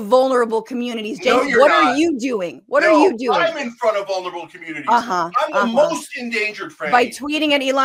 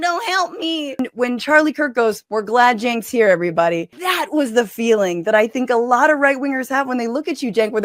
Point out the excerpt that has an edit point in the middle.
second; 3 cuts; at 1.0 s, 2.2 s, 4.0 s

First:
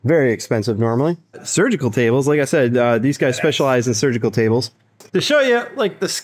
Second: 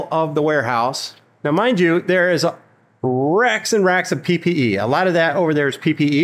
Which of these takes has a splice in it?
first; 2 cuts; at 1.4 s, 5.0 s

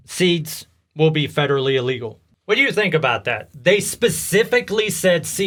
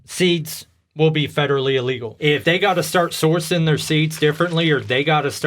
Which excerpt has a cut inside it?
second; 1 cut; at 2.4 s

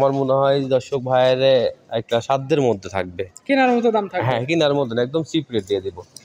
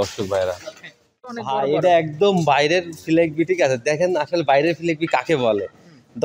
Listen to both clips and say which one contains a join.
second; 1 cut; at 1.2 s

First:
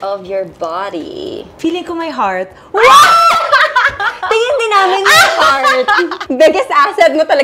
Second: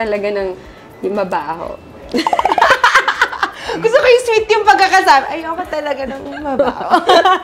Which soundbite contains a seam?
first; 2 cuts; at 1.5 s, 6.2 s

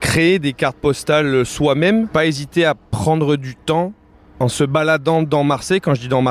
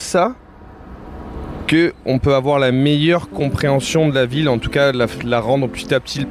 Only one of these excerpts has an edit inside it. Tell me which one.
first; 1 cut; at 2.1 s

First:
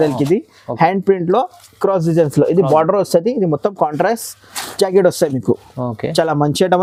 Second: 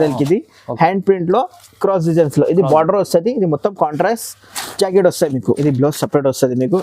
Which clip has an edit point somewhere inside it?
second; 1 cut; at 5.6 s

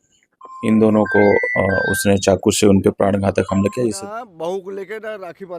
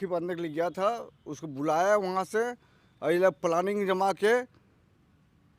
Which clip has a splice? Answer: first; 1 cut; at 3.9 s

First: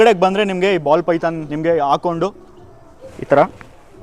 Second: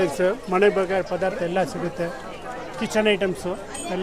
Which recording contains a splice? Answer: first; 1 cut; at 1.5 s

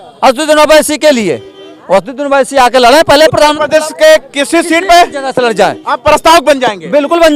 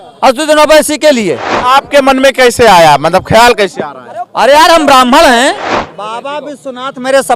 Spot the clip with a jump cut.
second; 2 cuts; at 1.5 s, 5.7 s

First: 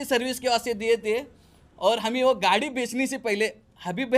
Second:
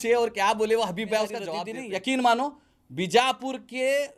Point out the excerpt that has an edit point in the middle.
second; 1 cut; at 1.6 s

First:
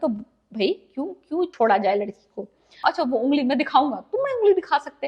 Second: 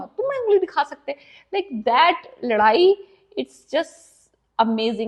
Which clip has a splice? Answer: first; 1 cut; at 2.8 s

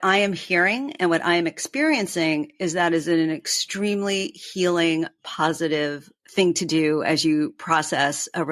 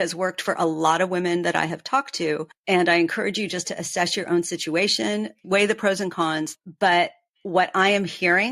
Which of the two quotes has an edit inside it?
second; 2 cuts; at 5.4 s, 6.5 s

